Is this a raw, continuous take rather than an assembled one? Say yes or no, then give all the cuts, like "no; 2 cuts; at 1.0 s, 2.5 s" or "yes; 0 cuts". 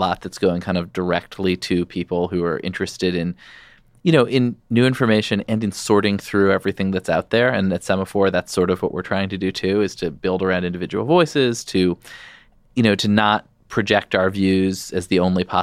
yes; 0 cuts